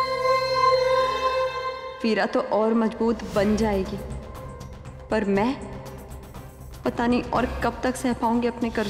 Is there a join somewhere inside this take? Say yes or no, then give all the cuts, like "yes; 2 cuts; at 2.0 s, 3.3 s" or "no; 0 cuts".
no; 0 cuts